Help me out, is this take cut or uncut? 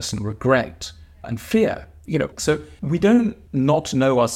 cut